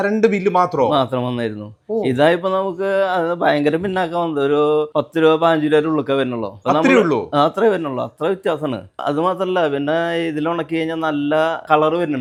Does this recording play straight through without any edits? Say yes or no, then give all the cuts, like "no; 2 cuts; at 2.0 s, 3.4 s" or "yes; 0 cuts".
yes; 0 cuts